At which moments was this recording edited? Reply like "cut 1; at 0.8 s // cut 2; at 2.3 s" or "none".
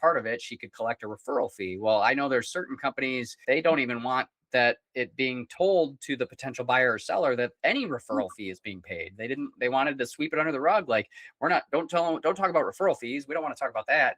cut 1; at 3.4 s